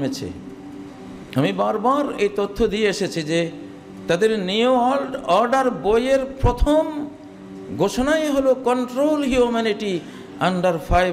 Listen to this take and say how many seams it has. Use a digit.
0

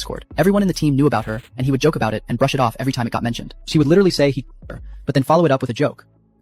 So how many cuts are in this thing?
1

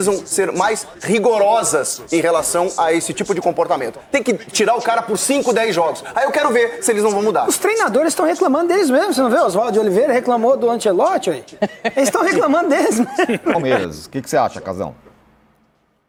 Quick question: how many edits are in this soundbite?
0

